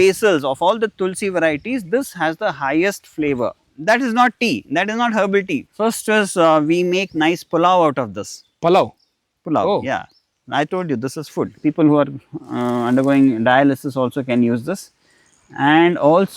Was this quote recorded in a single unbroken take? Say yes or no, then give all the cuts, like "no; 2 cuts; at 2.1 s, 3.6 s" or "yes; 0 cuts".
no; 3 cuts; at 3.7 s, 5.7 s, 11.5 s